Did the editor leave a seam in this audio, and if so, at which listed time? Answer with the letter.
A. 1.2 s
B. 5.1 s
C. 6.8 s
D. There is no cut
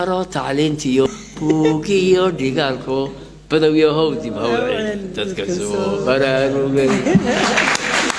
A